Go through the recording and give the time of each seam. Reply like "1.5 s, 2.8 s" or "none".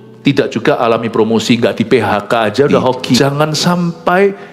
3.2 s